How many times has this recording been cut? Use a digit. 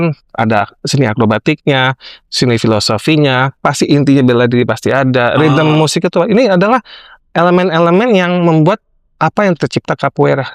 0